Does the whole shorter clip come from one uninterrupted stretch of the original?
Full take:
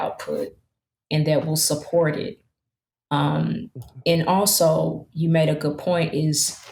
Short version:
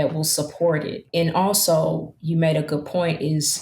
no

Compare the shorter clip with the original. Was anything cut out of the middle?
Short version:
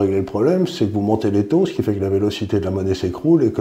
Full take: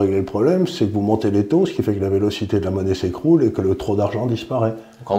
no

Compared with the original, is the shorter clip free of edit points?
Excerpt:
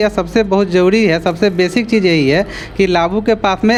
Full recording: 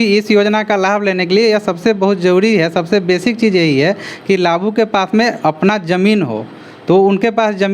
yes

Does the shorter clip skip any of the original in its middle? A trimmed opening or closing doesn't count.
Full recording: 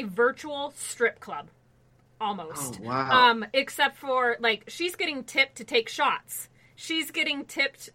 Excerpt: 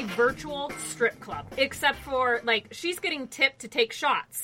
yes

